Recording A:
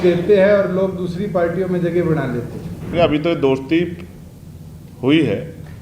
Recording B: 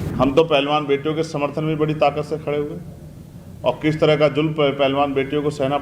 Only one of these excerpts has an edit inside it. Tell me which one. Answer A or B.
A